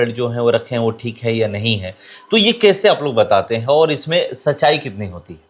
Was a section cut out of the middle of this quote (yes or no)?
no